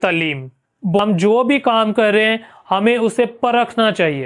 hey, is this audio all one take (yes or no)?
no